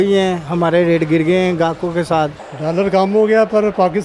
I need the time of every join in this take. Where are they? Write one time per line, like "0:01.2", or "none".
0:02.5